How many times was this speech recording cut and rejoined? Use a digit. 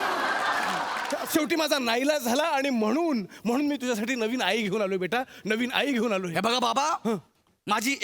1